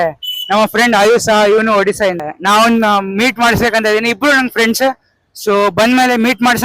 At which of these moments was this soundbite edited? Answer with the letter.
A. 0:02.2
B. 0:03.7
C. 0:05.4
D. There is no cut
A